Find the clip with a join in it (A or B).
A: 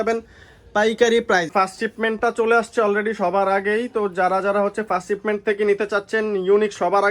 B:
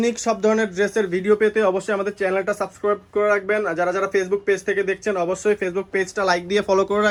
A